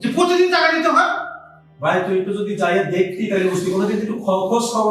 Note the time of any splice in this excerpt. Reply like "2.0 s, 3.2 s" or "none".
none